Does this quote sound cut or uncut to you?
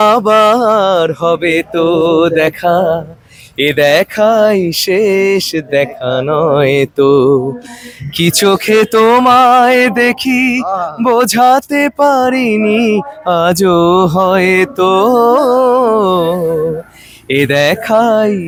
uncut